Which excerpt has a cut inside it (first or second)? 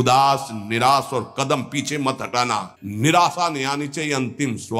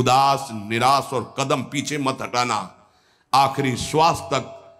first